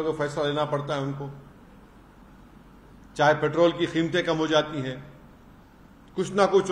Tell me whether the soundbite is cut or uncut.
uncut